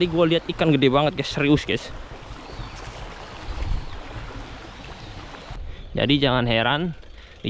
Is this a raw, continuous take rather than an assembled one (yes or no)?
no